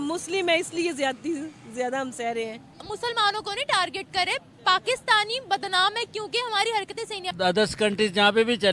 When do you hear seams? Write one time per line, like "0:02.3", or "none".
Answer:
0:02.8
0:07.2